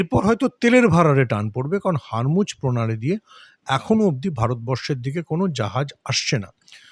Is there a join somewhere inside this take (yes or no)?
no